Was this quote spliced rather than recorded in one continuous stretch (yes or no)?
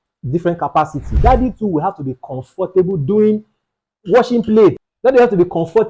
yes